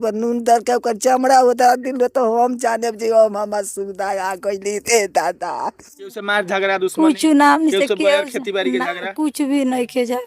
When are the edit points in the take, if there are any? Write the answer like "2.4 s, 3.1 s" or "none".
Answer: 6.2 s